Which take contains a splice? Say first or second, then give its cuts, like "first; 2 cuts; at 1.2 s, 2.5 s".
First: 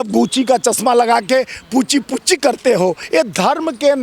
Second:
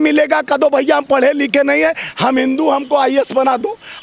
first; 1 cut; at 3.0 s